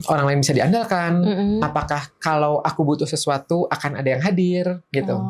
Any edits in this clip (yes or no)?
no